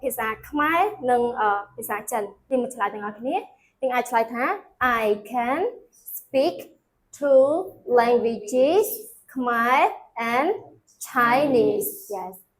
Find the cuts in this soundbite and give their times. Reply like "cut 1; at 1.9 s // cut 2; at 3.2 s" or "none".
cut 1; at 2.5 s